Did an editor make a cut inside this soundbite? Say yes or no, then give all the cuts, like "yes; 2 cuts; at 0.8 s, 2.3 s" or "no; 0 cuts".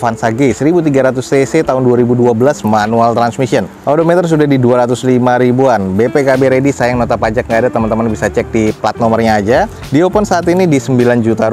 no; 0 cuts